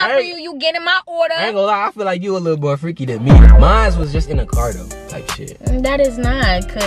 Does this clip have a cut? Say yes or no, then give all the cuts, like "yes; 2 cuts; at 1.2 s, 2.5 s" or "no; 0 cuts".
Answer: no; 0 cuts